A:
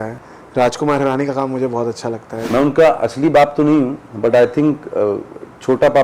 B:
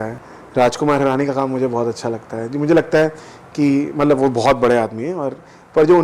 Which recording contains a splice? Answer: A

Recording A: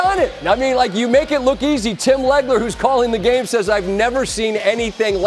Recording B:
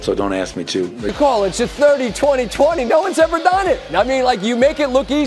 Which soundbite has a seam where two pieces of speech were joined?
B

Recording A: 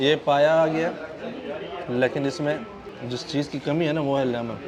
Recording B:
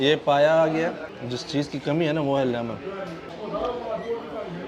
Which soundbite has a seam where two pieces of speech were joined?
B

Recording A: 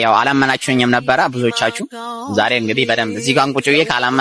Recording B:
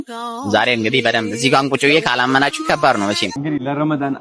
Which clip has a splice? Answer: B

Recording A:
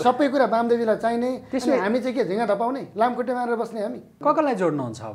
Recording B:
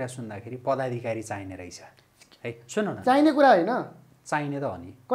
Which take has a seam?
A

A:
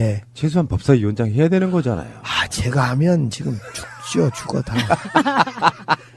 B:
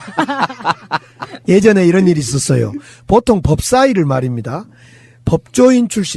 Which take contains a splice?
B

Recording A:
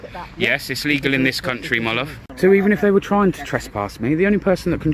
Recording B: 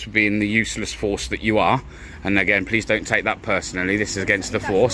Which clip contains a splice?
A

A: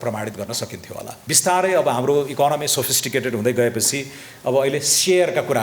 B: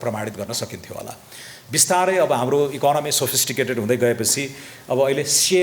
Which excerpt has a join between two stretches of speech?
A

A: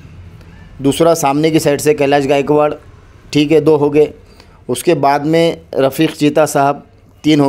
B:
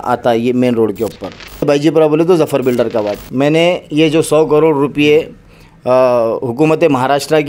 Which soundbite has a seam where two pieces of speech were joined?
B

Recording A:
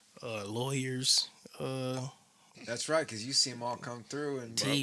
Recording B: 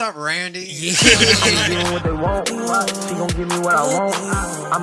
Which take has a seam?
B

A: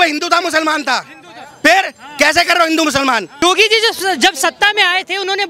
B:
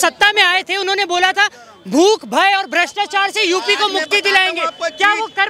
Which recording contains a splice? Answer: A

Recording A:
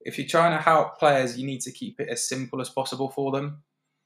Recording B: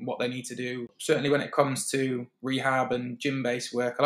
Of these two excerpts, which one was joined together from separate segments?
B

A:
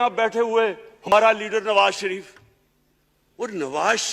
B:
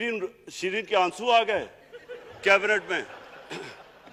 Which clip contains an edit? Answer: A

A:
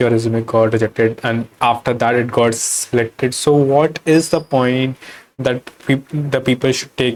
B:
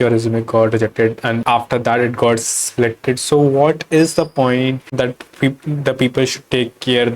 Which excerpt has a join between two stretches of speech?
B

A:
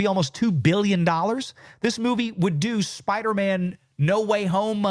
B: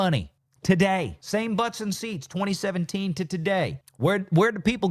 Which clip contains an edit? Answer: B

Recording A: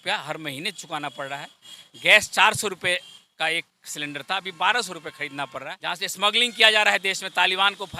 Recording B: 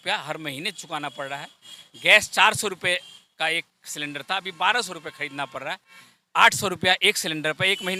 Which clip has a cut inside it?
A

